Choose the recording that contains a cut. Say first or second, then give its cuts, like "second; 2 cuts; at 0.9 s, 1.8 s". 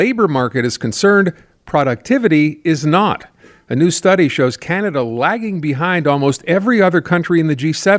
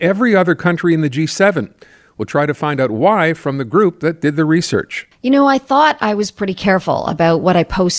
second; 1 cut; at 5.0 s